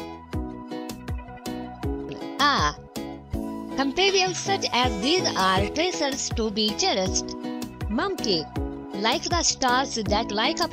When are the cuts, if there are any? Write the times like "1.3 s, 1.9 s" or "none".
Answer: none